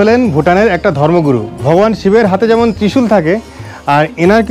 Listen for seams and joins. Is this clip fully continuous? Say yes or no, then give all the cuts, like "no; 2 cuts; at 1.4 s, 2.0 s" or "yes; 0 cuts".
no; 1 cut; at 1.5 s